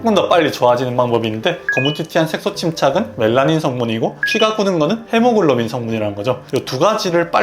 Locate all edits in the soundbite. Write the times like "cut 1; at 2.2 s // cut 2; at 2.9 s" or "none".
cut 1; at 1.6 s // cut 2; at 6.4 s

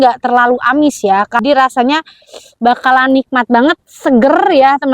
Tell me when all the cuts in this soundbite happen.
cut 1; at 1.4 s

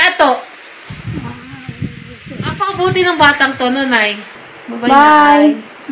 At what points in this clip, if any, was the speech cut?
cut 1; at 4.3 s

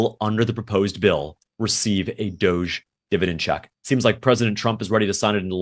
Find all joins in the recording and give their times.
cut 1; at 3.7 s

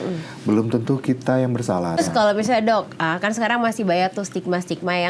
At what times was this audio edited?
cut 1; at 2.0 s

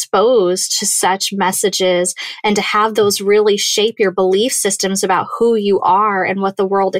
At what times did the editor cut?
none

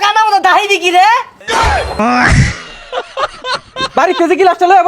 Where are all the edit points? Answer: cut 1; at 1.7 s // cut 2; at 3.8 s

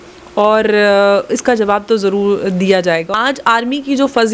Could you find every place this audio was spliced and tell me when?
cut 1; at 3.1 s

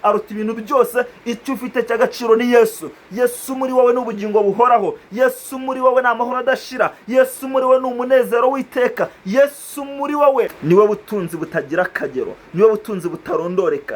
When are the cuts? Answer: cut 1; at 10.6 s

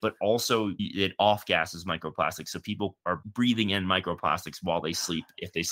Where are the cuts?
cut 1; at 3.2 s

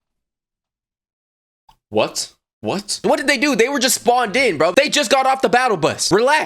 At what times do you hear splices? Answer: cut 1; at 3.0 s // cut 2; at 4.7 s

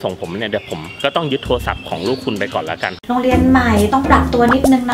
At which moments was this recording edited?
cut 1; at 3.0 s

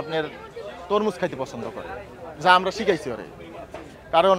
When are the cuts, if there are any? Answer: none

